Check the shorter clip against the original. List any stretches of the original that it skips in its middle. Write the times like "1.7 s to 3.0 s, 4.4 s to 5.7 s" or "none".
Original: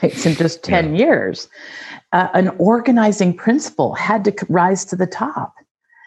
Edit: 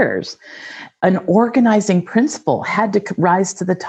2.1 s to 2.3 s